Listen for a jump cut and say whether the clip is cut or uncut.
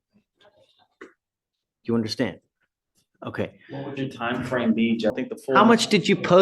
cut